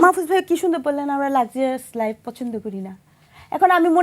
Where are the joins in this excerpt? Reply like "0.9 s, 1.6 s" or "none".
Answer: none